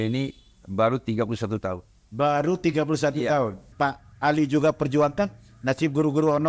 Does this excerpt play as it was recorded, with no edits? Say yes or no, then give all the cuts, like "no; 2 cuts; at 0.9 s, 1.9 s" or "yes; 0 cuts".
no; 1 cut; at 3.7 s